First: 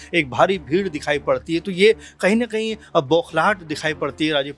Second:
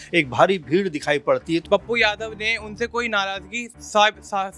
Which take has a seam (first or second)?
second